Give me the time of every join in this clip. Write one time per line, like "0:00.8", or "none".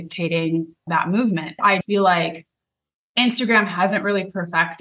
0:01.8

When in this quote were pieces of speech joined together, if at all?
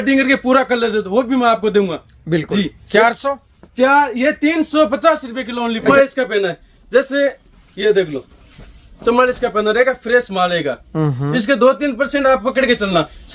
0:05.9

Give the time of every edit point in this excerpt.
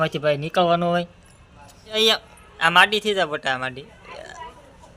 0:02.0

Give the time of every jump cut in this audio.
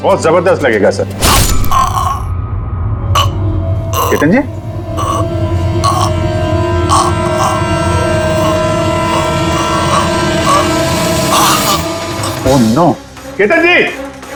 none

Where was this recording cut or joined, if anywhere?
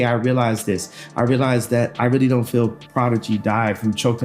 none

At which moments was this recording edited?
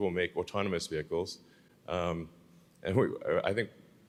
none

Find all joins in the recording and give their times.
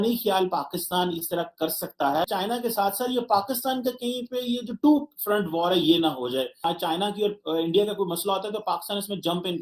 0:02.3
0:06.6

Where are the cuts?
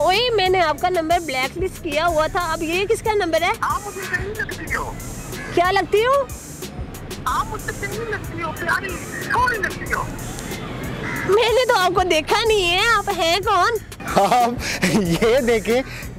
0:03.6
0:14.0

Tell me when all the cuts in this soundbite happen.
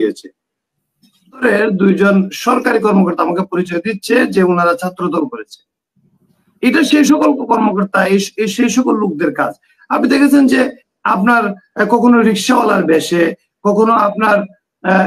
0:01.4

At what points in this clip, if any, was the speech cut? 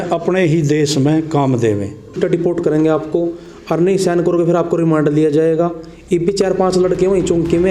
0:02.2

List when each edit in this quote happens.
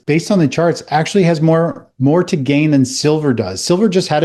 none

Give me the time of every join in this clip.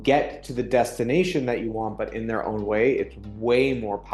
none

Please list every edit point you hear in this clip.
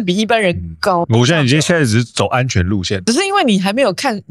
0:01.0
0:02.9

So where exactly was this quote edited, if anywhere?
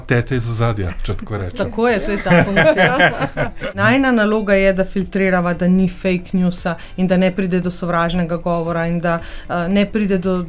0:03.5

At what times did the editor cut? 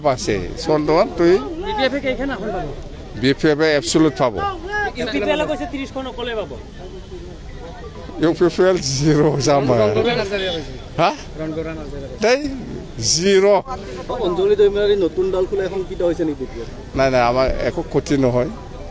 none

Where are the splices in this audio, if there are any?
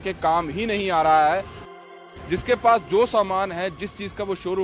0:01.9

